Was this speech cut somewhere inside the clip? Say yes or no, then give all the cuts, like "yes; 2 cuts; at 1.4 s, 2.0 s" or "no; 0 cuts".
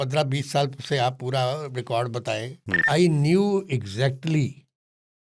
yes; 1 cut; at 2.8 s